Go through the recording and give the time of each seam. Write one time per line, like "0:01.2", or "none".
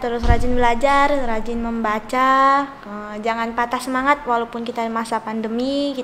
none